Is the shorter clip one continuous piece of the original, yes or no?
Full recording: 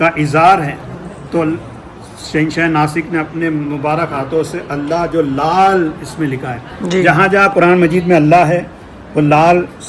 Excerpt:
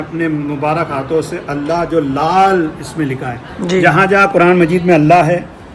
yes